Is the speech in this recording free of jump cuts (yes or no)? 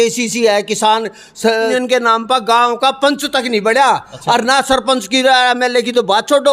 no